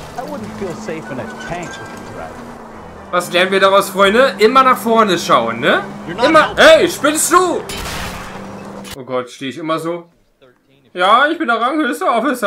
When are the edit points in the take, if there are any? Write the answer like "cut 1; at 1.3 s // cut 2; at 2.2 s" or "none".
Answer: cut 1; at 8.9 s